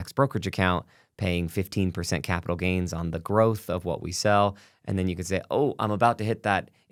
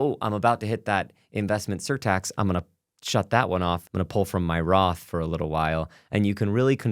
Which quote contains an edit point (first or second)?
second